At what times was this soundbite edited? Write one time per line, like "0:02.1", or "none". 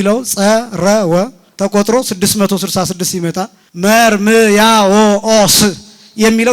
0:01.4
0:03.6